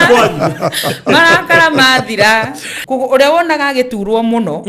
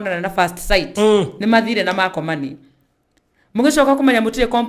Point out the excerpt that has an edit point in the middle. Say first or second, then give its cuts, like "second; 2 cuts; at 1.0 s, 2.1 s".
first; 1 cut; at 2.7 s